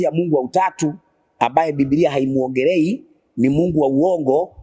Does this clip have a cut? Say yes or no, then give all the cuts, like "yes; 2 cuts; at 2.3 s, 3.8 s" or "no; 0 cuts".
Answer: no; 0 cuts